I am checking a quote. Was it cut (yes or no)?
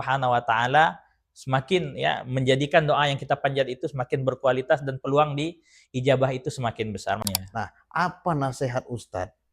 yes